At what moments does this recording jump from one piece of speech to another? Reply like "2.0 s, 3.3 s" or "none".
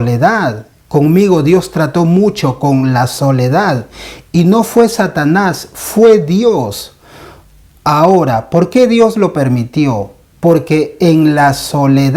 none

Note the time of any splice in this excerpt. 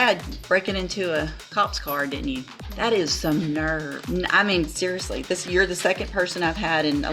2.6 s, 4.0 s

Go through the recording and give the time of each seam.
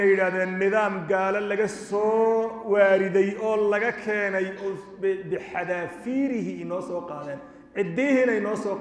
none

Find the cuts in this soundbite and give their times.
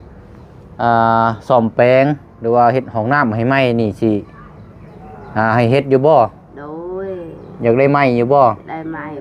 none

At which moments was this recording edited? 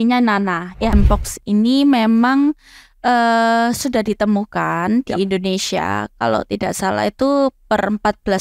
0.9 s

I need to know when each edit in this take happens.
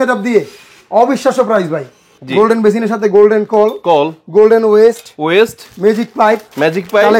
2.1 s

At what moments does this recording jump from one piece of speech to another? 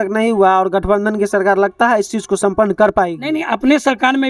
none

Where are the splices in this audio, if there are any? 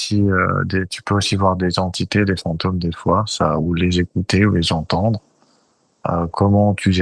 none

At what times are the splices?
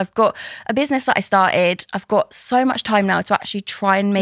none

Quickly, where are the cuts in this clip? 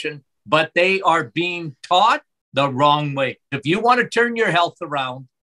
2.4 s, 3.6 s

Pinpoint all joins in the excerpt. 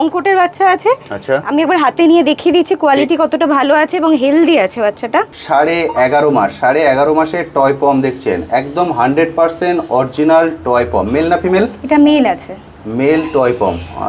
5.4 s

